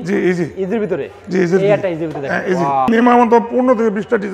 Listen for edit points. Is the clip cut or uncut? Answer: cut